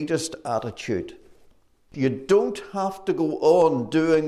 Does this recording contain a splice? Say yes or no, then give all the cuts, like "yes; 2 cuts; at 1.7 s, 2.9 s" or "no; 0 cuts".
yes; 1 cut; at 1.8 s